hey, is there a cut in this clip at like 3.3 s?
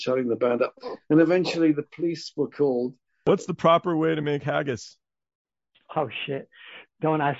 yes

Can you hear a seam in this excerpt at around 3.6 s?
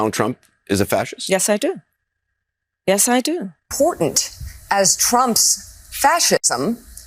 yes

